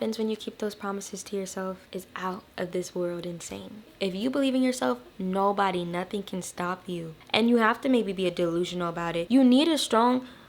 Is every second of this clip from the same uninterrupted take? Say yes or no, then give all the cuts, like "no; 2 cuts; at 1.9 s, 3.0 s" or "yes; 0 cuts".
no; 3 cuts; at 1.8 s, 3.8 s, 9.2 s